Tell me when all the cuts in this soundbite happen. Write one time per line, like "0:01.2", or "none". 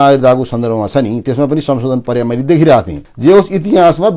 0:03.0